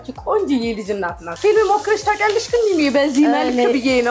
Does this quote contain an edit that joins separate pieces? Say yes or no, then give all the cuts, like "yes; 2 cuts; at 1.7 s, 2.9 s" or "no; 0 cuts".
yes; 1 cut; at 1.3 s